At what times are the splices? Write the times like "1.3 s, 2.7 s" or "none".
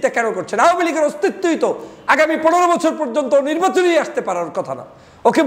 none

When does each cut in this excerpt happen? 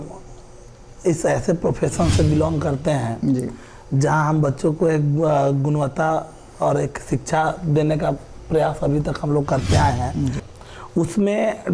10.4 s

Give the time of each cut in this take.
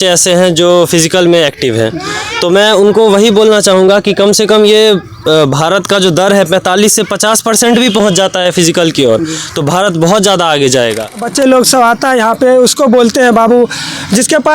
11.3 s

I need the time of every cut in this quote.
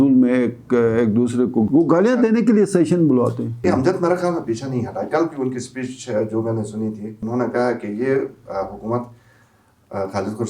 1.7 s, 3.6 s, 7.2 s

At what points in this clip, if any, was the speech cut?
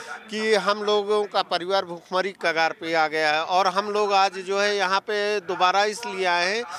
none

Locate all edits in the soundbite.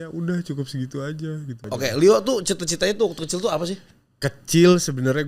1.7 s

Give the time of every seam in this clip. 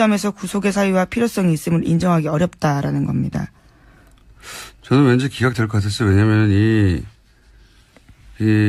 none

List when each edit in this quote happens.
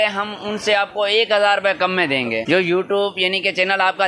2.4 s

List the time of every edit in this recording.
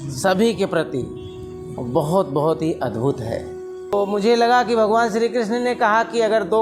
3.9 s

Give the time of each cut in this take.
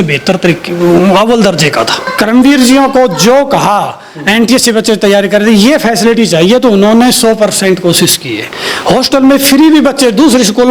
2.0 s

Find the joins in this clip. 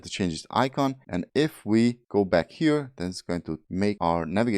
1.2 s, 2.0 s, 3.8 s

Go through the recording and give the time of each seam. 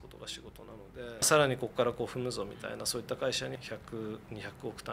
1.3 s, 3.5 s

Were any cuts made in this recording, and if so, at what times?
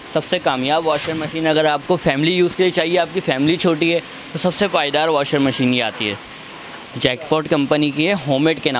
none

